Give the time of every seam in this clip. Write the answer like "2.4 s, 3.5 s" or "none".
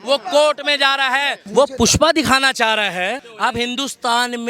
1.4 s, 3.3 s